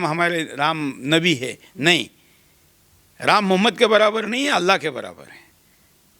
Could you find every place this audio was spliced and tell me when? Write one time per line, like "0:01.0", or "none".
none